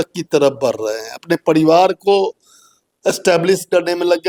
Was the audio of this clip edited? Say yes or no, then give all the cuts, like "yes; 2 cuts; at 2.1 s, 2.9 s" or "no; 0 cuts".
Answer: no; 0 cuts